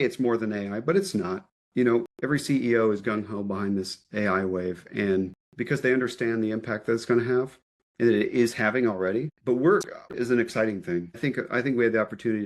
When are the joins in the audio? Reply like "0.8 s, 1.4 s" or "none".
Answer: 9.3 s, 10.1 s, 11.2 s